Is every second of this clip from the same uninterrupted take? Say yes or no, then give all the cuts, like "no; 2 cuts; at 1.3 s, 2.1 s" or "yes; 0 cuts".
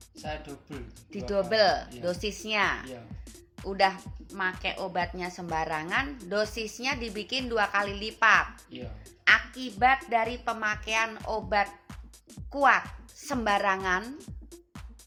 yes; 0 cuts